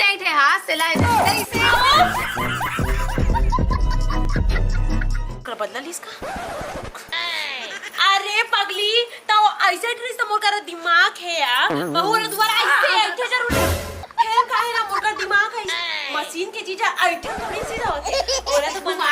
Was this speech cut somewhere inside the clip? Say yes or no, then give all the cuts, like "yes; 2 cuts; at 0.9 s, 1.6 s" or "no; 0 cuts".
no; 0 cuts